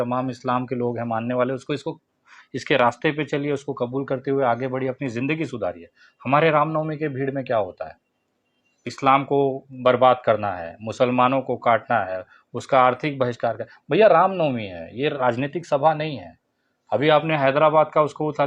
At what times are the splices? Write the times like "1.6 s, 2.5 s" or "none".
none